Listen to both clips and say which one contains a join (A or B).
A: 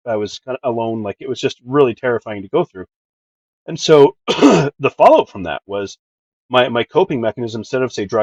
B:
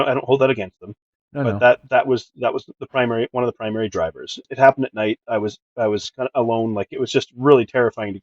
B